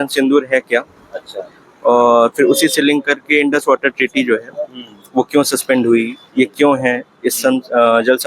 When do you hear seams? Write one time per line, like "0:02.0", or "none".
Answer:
none

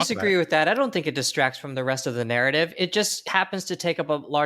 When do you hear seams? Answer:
0:03.2

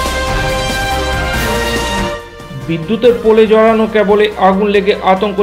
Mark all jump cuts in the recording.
0:02.3

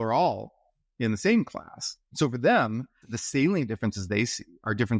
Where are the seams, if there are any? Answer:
0:03.1

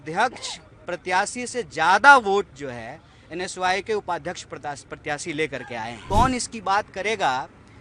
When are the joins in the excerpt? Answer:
0:06.0

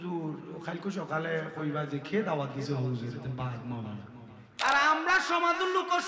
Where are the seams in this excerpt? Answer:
0:04.6

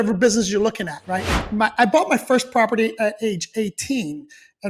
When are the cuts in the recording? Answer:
0:01.3

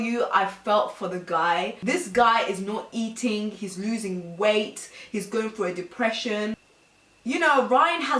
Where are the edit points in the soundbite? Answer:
0:06.6

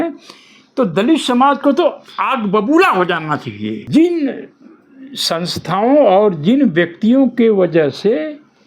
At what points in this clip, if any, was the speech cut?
0:03.8

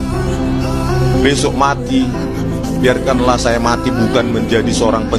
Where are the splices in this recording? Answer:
none

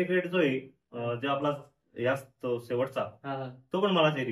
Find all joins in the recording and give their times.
none

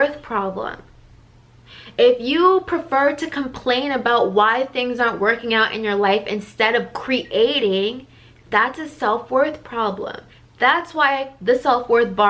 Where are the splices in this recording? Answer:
none

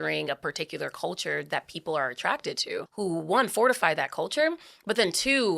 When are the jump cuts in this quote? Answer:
0:02.9

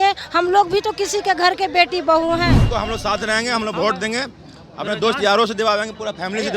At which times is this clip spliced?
0:02.6

